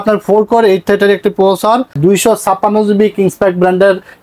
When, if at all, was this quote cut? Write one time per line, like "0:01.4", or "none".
0:02.0